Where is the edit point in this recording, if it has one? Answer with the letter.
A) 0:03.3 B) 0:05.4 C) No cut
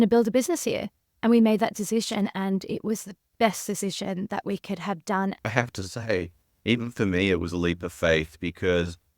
B